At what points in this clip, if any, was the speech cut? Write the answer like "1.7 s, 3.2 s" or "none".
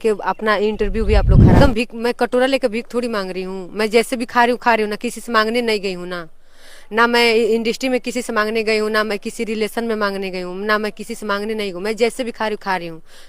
1.6 s